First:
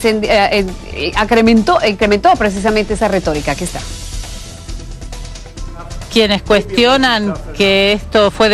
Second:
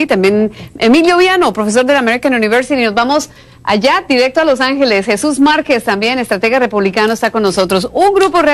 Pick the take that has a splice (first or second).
second